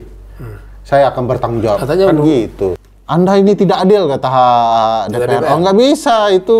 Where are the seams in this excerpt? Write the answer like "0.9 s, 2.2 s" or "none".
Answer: 2.7 s